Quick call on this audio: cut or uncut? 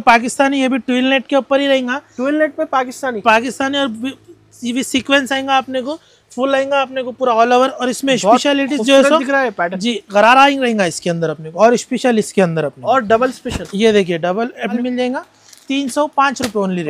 cut